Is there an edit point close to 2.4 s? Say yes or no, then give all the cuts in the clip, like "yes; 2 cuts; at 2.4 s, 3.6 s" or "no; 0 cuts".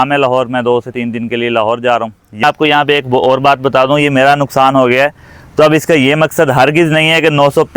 yes; 1 cut; at 2.4 s